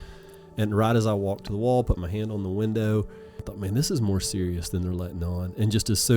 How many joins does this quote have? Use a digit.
1